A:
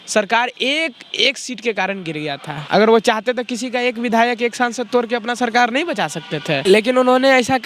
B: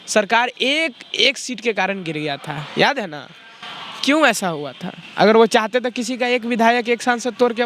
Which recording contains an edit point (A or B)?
A